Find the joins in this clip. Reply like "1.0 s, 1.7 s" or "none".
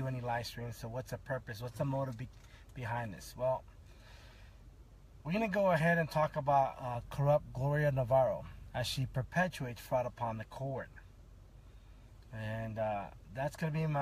1.4 s

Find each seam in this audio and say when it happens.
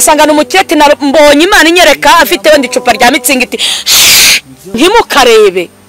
4.8 s

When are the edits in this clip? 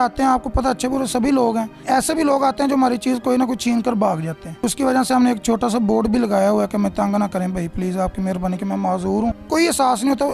none

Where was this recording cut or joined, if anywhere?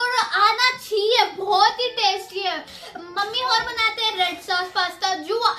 none

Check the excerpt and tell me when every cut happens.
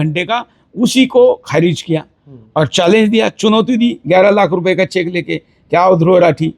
none

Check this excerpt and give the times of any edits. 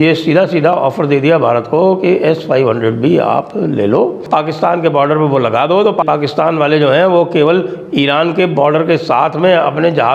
4.2 s, 6.0 s

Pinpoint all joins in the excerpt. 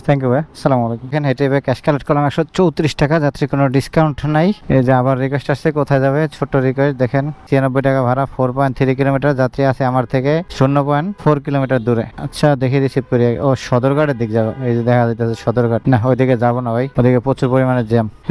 none

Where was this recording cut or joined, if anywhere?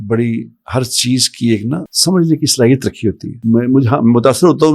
1.9 s, 3.3 s

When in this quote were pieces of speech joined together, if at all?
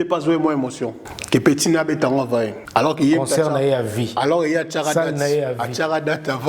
1.1 s, 2.6 s

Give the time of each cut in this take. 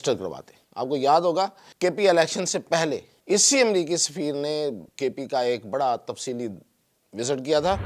1.6 s, 3.1 s, 4.9 s

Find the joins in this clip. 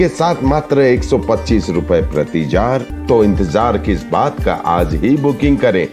2.9 s

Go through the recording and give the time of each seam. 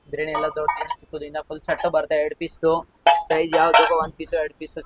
none

